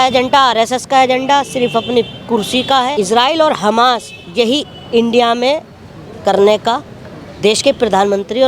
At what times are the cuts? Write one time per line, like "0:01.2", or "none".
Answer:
0:02.9